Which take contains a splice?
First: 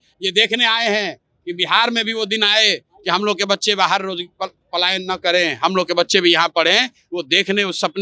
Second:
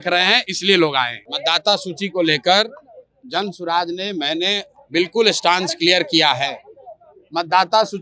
second; 1 cut; at 1.2 s

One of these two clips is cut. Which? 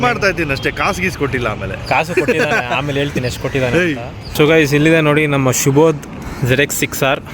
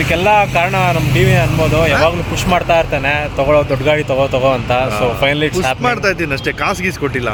first; 1 cut; at 4.3 s

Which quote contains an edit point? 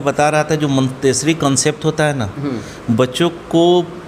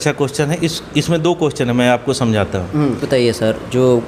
second; 1 cut; at 3.0 s

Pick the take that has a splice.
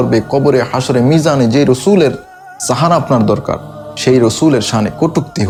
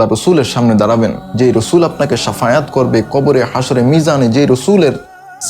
second; 1 cut; at 1.2 s

